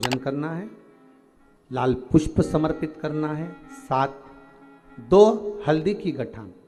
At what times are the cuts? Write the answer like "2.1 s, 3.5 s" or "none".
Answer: none

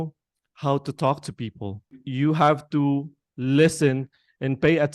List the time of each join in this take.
2.0 s

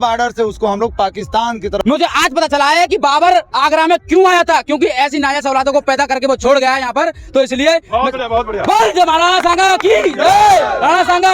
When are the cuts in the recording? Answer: 1.8 s

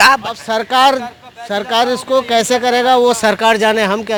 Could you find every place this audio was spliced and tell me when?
none

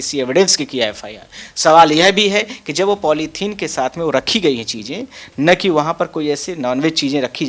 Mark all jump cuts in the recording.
none

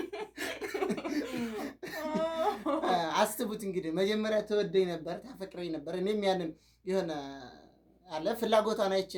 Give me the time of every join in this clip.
none

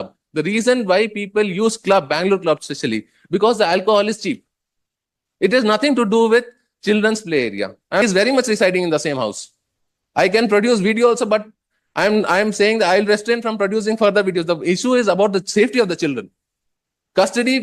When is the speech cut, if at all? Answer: 8.0 s

